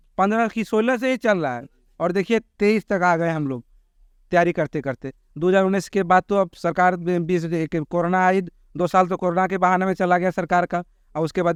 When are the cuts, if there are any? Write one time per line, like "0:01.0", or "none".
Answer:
none